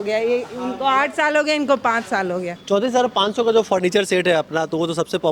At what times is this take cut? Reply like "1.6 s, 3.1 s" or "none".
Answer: 2.5 s